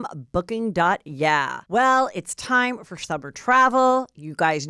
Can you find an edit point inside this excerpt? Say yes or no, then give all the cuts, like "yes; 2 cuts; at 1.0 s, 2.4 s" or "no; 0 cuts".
yes; 1 cut; at 1.6 s